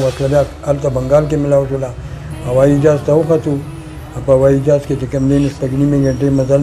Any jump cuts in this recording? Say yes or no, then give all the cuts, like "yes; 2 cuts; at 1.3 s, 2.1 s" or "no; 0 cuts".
no; 0 cuts